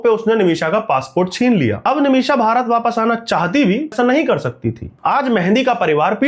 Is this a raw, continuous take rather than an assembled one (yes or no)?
no